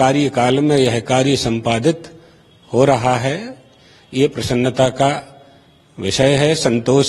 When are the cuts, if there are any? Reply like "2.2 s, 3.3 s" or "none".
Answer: none